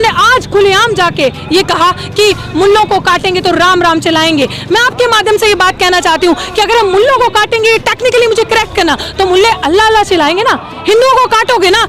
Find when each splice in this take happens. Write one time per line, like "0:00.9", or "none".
none